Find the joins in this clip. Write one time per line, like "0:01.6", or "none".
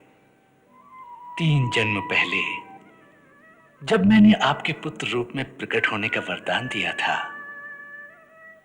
0:01.0